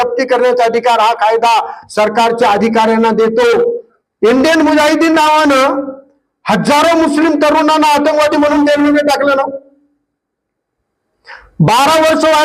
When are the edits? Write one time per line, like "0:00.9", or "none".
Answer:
0:03.9